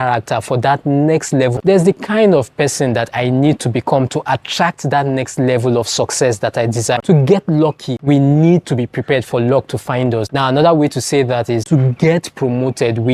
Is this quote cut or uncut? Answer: cut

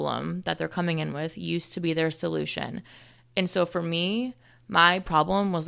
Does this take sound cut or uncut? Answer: uncut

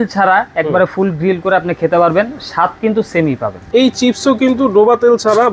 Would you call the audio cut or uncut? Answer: cut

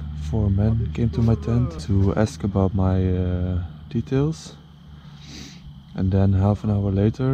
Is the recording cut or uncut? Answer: cut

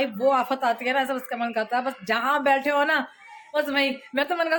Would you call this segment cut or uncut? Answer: uncut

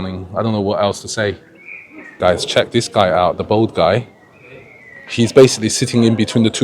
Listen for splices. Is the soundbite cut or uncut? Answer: cut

